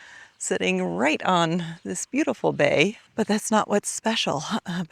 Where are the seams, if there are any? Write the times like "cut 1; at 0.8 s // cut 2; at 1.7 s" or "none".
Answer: cut 1; at 3.0 s